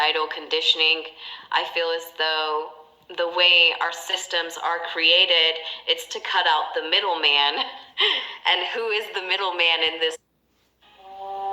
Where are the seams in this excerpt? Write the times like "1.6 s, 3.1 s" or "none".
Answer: 10.3 s